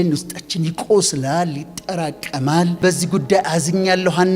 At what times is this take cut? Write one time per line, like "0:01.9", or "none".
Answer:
0:02.8